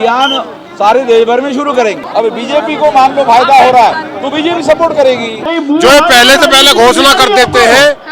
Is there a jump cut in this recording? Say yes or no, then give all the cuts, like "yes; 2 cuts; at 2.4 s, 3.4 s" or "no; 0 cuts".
yes; 2 cuts; at 2.0 s, 5.5 s